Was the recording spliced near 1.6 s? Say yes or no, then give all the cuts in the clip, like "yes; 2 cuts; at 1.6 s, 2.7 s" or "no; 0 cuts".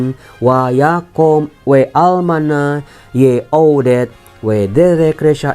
yes; 1 cut; at 1.6 s